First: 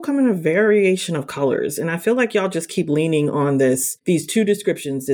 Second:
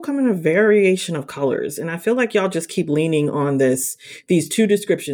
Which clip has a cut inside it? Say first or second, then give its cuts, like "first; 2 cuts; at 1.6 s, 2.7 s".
first; 1 cut; at 3.9 s